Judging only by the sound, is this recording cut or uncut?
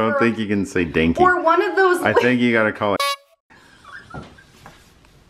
cut